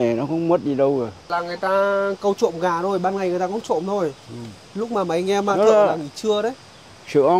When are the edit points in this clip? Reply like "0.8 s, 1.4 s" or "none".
1.2 s